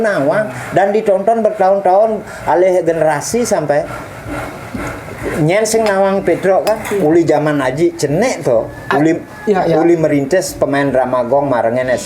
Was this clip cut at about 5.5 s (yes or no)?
no